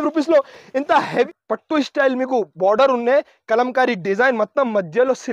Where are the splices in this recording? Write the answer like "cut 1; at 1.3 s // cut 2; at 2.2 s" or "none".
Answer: cut 1; at 1.3 s